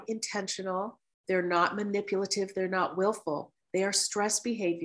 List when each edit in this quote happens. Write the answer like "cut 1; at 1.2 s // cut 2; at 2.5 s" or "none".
none